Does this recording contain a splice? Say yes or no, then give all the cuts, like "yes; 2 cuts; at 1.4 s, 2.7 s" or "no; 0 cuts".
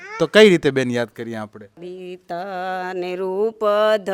yes; 1 cut; at 1.7 s